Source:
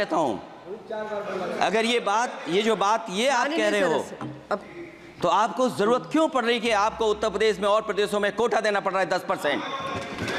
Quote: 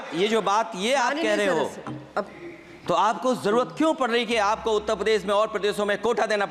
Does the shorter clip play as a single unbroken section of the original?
yes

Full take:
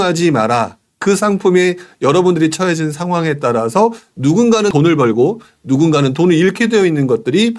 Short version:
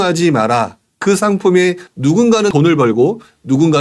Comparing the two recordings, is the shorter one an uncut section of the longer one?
no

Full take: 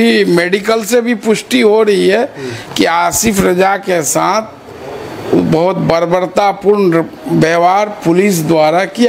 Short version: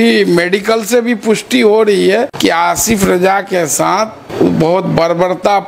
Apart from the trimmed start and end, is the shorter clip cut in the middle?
yes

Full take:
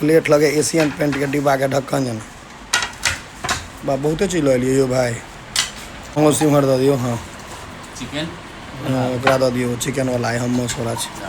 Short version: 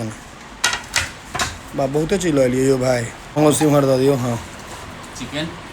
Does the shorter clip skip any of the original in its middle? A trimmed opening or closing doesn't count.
yes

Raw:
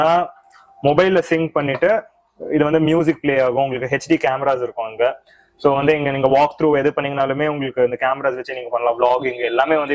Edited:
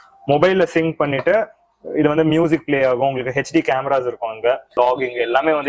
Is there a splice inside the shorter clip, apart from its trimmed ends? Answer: yes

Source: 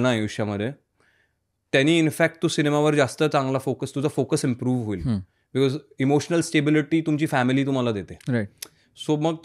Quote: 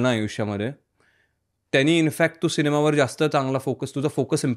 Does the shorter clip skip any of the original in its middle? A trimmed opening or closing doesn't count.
no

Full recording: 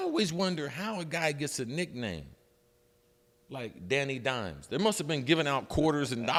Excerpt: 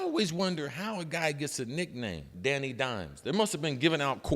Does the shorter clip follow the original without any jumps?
no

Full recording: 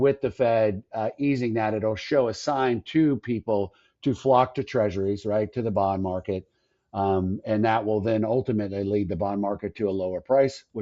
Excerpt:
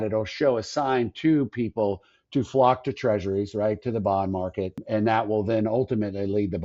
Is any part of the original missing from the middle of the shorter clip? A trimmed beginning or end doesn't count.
yes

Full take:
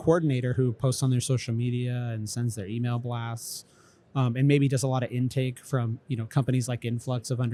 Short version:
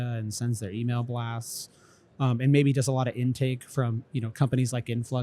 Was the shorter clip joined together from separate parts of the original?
no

